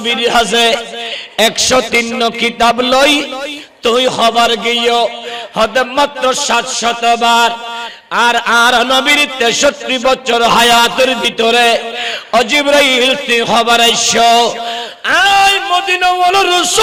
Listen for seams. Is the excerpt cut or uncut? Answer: uncut